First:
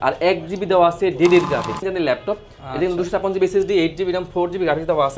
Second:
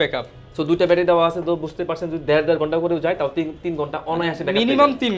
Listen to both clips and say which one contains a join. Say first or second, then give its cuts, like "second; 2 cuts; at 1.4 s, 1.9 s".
first; 1 cut; at 1.8 s